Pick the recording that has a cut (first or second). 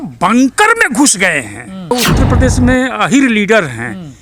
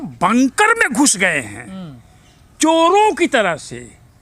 first